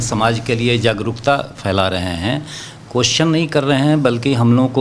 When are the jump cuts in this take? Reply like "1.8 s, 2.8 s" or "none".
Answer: none